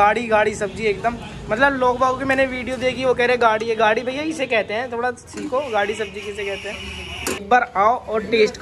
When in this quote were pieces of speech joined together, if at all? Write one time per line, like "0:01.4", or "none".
0:07.4